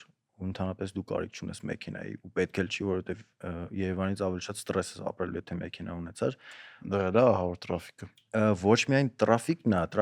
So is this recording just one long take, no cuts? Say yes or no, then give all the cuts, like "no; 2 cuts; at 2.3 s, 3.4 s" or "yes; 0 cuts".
yes; 0 cuts